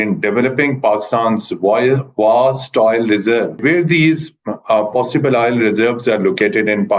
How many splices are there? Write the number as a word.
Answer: one